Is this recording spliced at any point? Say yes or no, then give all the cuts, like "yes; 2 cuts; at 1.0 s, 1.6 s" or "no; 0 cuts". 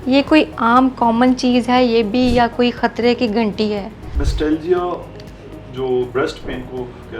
yes; 1 cut; at 4.2 s